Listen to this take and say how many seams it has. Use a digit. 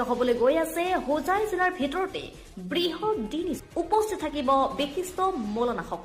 1